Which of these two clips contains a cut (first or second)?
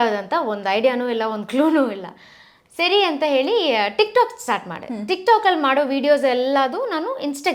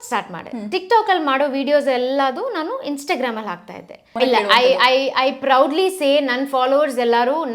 second